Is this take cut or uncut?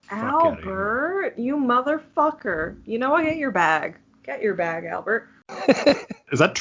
uncut